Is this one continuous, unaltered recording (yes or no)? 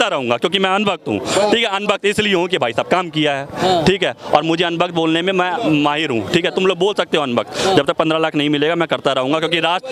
yes